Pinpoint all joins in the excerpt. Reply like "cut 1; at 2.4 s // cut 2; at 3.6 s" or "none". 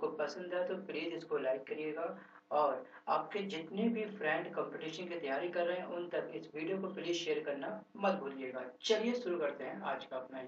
cut 1; at 7.4 s